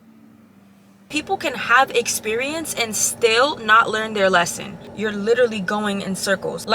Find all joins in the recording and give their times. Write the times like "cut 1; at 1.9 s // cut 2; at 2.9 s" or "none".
cut 1; at 1.0 s // cut 2; at 4.9 s